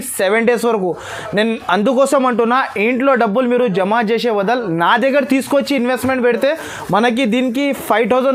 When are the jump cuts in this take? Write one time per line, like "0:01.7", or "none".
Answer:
none